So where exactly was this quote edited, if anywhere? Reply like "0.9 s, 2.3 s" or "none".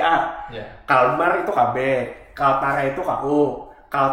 none